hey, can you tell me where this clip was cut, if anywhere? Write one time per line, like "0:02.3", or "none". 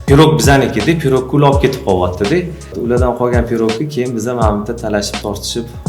0:02.7